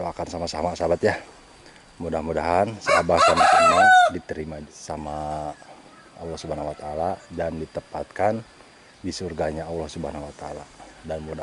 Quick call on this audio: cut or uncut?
cut